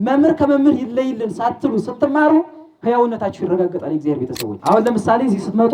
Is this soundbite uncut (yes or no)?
no